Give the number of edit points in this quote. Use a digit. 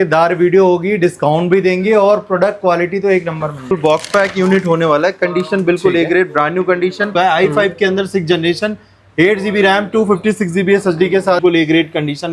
3